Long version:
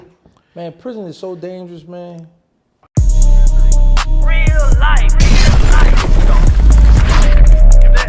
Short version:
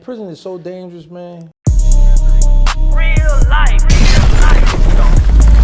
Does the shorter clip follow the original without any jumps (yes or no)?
no